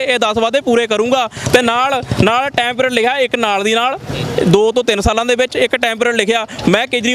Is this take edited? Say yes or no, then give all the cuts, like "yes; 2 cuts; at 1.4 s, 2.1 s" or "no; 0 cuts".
no; 0 cuts